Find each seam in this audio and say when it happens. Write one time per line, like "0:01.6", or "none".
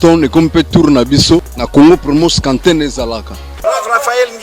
0:01.6
0:03.5